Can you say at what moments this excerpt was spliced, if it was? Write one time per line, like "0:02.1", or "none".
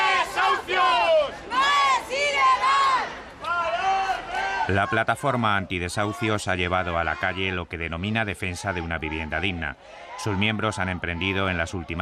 none